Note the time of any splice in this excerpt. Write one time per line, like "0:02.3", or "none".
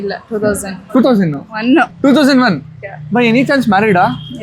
0:01.9

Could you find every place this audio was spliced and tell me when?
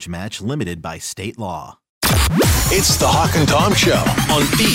0:01.8

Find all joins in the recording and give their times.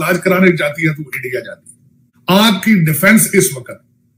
0:02.1

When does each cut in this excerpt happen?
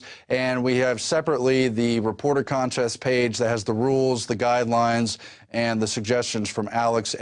0:06.2

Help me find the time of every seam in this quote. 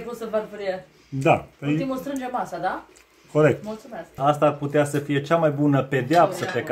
0:04.2

